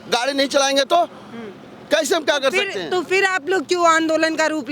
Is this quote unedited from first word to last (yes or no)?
yes